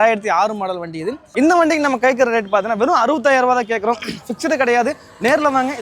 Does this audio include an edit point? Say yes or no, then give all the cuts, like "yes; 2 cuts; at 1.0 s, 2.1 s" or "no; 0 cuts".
yes; 1 cut; at 1.2 s